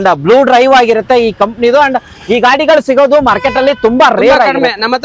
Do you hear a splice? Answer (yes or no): no